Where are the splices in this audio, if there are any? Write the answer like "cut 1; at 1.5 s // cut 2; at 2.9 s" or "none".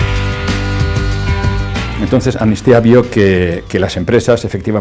cut 1; at 1.9 s